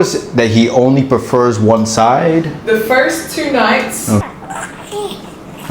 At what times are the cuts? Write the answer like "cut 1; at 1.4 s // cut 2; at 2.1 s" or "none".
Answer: cut 1; at 4.2 s